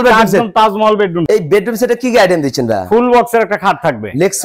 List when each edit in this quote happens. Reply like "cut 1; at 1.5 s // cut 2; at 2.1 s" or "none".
cut 1; at 1.2 s